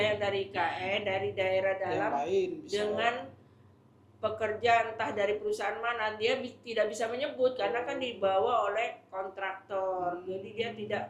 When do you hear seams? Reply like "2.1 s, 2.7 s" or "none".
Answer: none